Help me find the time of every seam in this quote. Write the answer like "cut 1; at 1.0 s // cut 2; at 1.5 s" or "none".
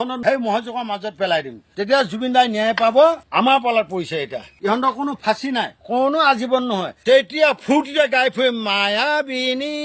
cut 1; at 3.2 s // cut 2; at 4.5 s // cut 3; at 6.9 s

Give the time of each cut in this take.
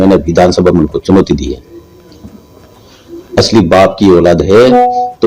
none

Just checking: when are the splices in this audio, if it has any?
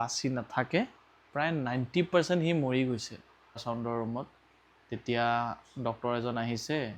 cut 1; at 3.6 s

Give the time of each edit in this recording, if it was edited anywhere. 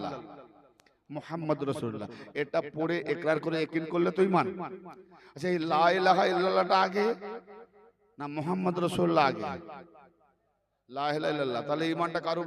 none

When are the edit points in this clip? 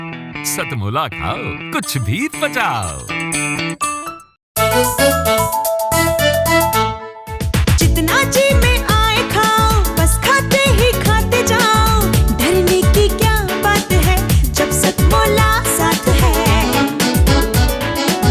cut 1; at 4.4 s

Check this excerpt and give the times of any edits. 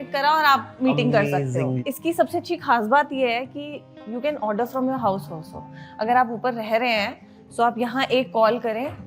cut 1; at 1.9 s

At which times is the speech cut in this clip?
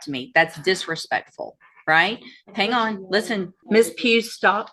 cut 1; at 3.6 s

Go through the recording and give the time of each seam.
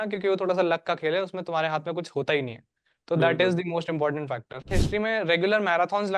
cut 1; at 4.8 s

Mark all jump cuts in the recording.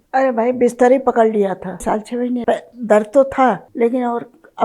cut 1; at 2.0 s // cut 2; at 3.7 s

